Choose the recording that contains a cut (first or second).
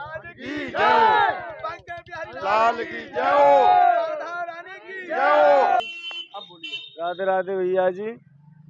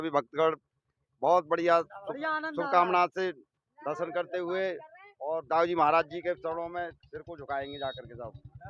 first